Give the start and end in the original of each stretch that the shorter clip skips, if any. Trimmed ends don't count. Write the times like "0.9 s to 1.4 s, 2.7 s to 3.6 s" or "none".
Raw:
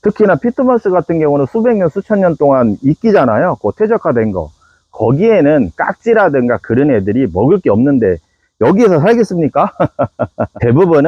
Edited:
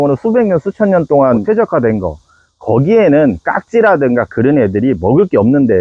2.7 s to 3.8 s